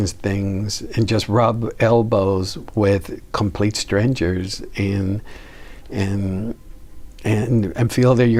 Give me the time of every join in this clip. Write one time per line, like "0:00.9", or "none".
none